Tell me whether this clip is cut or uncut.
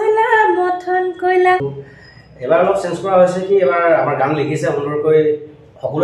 cut